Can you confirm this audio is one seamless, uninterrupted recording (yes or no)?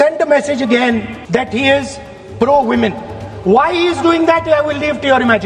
no